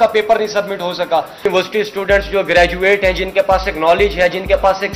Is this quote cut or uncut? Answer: cut